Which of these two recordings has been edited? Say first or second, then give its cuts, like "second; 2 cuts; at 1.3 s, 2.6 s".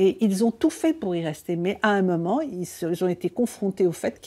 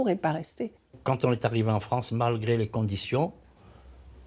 second; 1 cut; at 1.0 s